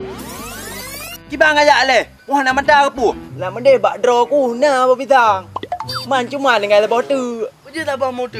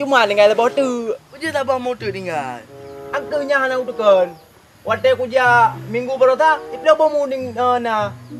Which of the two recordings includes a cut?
first; 1 cut; at 3.3 s

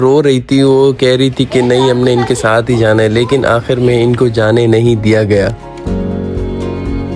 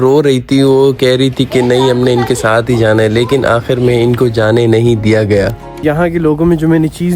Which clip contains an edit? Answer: second; 1 cut; at 5.8 s

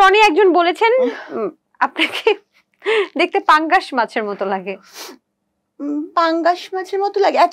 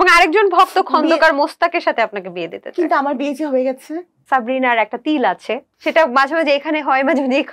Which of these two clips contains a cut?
second; 2 cuts; at 4.2 s, 5.7 s

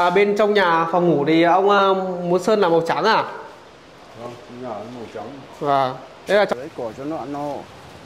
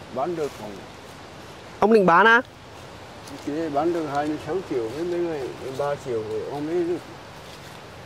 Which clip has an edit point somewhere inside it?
first; 1 cut; at 6.5 s

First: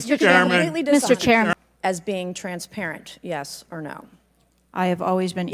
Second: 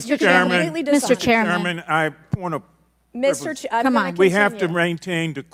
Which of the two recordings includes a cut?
first; 1 cut; at 1.5 s

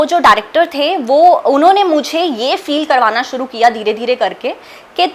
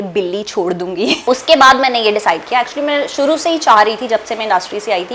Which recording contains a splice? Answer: second; 1 cut; at 1.2 s

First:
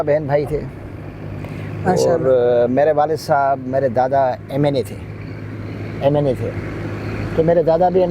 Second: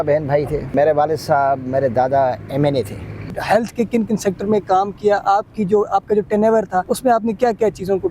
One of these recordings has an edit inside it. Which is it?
second; 3 cuts; at 0.7 s, 3.3 s, 6.9 s

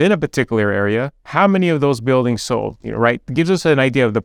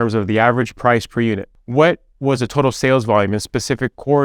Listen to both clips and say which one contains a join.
second; 1 cut; at 1.5 s

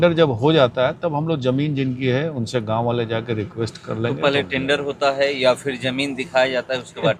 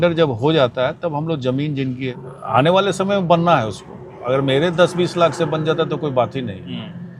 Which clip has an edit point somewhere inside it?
second; 1 cut; at 2.1 s

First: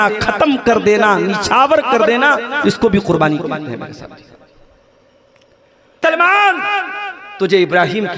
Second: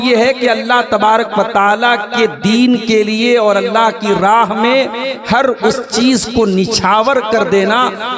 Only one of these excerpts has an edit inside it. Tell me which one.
first; 1 cut; at 6.0 s

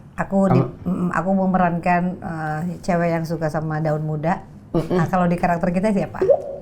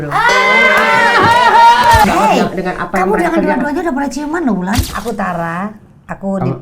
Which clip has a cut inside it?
second; 2 cuts; at 2.0 s, 4.9 s

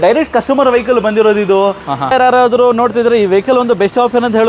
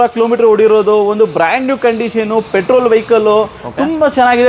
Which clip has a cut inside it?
first; 1 cut; at 2.1 s

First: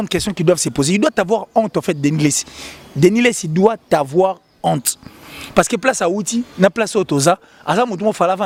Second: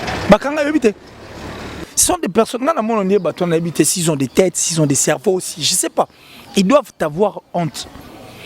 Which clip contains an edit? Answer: second; 1 cut; at 1.7 s

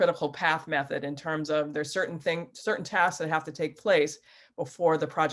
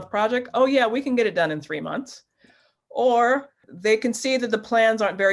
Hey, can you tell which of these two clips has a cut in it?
second; 1 cut; at 3.6 s

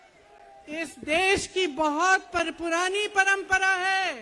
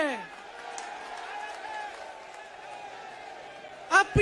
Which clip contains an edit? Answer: second; 1 cut; at 2.4 s

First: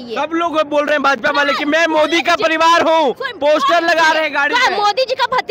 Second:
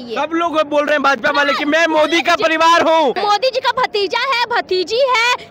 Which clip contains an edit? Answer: second; 1 cut; at 3.2 s

